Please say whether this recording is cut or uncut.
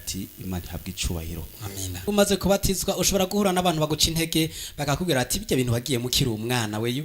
cut